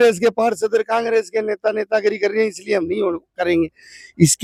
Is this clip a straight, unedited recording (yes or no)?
yes